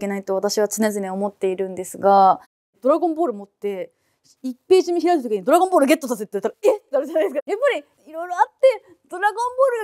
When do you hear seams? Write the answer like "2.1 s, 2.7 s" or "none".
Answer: 7.3 s